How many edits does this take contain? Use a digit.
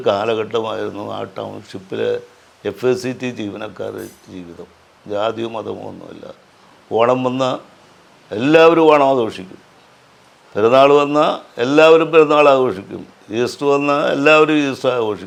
0